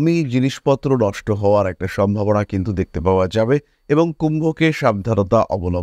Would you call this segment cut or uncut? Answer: uncut